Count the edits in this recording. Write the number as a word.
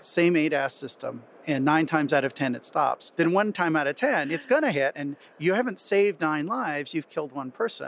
two